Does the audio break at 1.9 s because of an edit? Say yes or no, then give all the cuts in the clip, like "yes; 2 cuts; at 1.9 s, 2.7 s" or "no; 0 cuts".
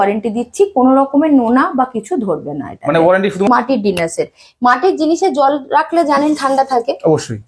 no; 1 cut; at 3.5 s